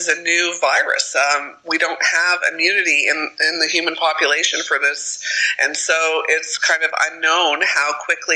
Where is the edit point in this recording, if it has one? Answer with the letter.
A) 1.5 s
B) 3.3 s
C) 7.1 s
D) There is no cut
D